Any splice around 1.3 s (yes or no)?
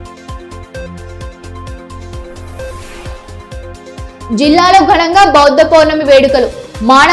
yes